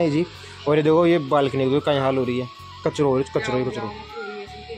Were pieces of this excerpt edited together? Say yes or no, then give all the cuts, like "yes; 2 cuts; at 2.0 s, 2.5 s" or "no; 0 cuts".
no; 0 cuts